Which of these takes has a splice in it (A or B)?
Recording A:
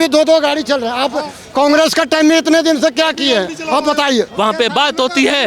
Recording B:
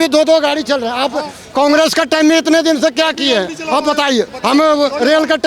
A